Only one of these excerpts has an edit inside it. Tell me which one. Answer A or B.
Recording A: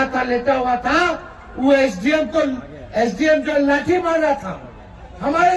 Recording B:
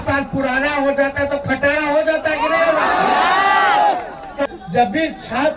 B